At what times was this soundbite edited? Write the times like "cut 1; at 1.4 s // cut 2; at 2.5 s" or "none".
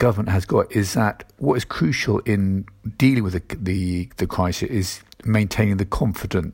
none